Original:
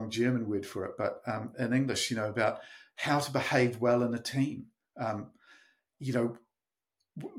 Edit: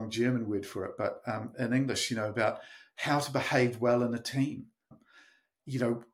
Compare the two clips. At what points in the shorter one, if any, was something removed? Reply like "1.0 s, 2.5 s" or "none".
4.9 s

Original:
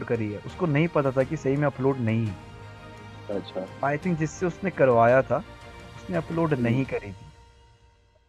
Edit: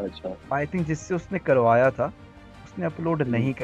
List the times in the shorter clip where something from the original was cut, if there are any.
none

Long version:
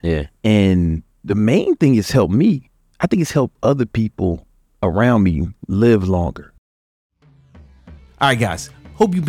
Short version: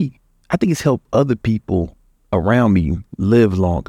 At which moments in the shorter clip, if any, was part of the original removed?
none

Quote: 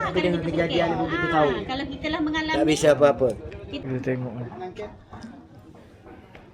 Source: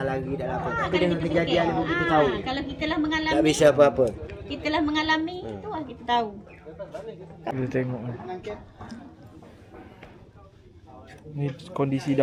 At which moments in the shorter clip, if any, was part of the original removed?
3.8 s

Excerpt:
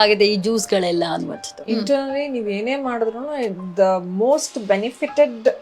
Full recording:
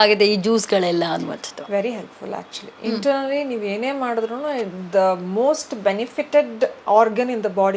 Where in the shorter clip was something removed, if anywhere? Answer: 1.5 s

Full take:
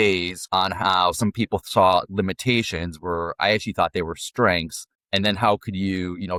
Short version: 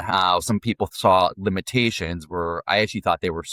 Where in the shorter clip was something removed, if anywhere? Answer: none

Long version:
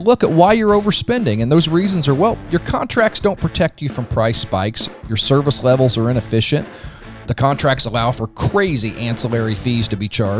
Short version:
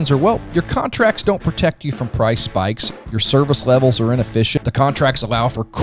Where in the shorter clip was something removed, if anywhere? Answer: 4.5 s

